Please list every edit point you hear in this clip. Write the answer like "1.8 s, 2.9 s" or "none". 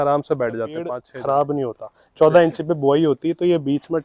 1.1 s